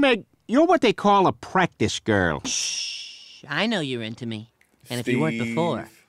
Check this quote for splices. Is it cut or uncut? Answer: cut